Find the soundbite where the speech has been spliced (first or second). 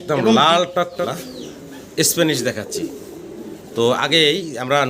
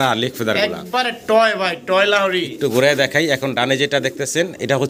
first